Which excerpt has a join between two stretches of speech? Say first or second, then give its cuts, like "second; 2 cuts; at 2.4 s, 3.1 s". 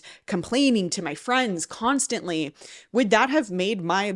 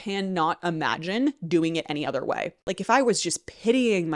second; 1 cut; at 2.5 s